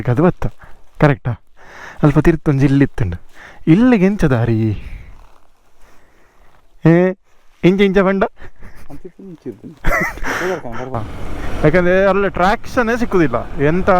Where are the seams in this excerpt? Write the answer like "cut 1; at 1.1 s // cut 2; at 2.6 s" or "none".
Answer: cut 1; at 11.0 s